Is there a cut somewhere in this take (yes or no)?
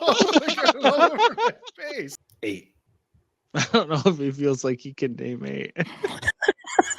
yes